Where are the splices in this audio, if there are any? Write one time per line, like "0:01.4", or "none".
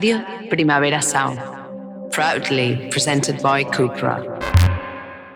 none